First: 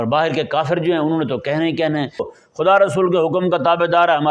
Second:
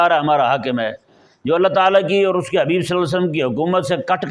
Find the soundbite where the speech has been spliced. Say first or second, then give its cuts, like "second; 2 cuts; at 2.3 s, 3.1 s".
first; 1 cut; at 2.3 s